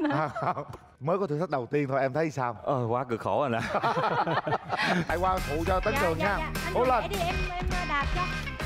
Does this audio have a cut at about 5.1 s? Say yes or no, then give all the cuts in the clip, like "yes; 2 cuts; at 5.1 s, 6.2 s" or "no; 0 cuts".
yes; 1 cut; at 5.1 s